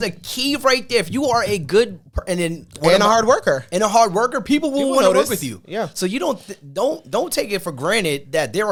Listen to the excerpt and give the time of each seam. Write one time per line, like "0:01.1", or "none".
none